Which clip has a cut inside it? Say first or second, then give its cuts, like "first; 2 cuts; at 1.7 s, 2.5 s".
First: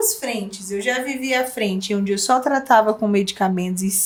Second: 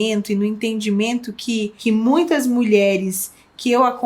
second; 1 cut; at 1.7 s